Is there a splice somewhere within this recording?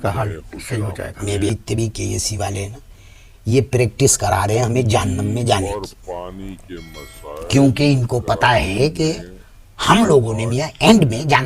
yes; 1 cut; at 1.5 s

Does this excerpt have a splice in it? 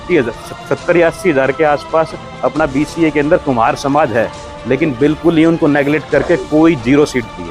no; 0 cuts

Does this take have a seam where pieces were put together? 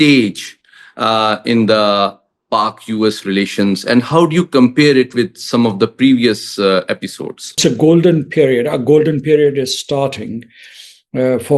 yes; 1 cut; at 7.6 s

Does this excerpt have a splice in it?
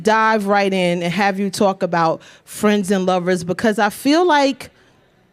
no; 0 cuts

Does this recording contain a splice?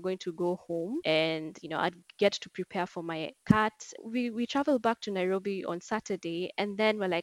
yes; 2 cuts; at 1.0 s, 3.9 s

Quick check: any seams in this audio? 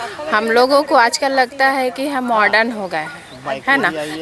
no; 0 cuts

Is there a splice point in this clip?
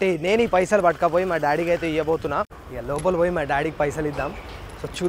yes; 1 cut; at 2.5 s

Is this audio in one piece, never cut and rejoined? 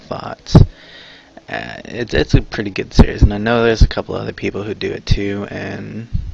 yes; 0 cuts

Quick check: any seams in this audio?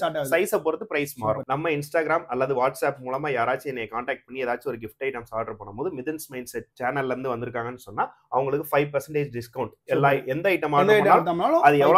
yes; 1 cut; at 1.4 s

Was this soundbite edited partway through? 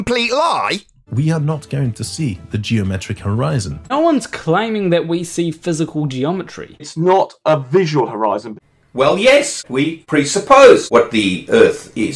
yes; 6 cuts; at 1.2 s, 3.9 s, 6.9 s, 8.5 s, 9.8 s, 10.9 s

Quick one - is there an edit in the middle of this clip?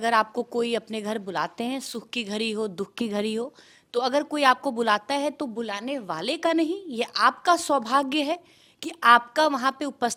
no; 0 cuts

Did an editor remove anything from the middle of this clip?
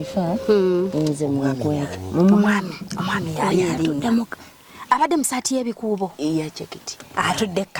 no; 0 cuts

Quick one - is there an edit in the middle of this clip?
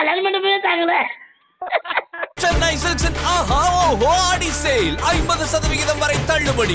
yes; 1 cut; at 2.3 s

